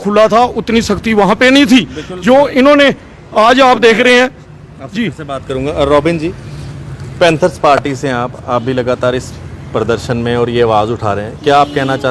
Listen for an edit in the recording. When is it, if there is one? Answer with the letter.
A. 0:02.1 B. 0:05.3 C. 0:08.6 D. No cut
D